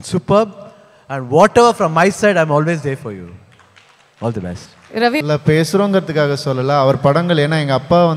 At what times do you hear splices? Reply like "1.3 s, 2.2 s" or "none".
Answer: 5.2 s